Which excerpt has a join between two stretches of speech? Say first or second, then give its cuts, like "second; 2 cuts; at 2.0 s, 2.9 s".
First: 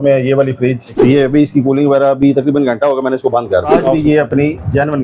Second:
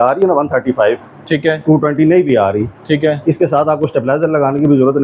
first; 2 cuts; at 0.9 s, 3.7 s